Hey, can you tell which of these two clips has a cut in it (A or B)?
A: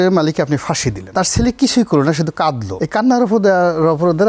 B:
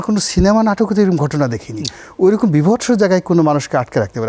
A